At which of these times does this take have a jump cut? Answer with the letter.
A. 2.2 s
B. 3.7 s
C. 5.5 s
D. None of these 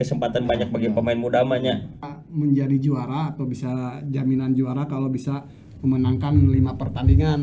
A